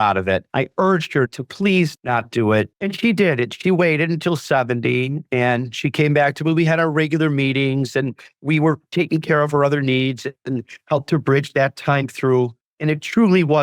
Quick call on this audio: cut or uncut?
cut